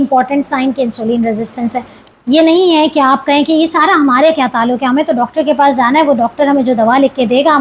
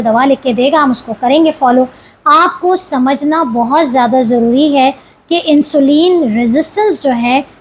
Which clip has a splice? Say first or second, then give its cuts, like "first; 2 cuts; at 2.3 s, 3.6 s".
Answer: first; 1 cut; at 2.0 s